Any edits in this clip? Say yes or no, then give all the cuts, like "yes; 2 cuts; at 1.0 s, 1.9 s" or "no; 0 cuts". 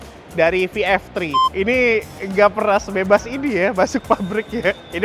yes; 1 cut; at 1.4 s